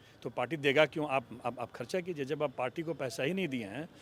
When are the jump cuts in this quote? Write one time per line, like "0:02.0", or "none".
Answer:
none